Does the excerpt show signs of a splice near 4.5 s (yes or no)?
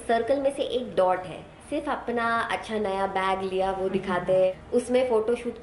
yes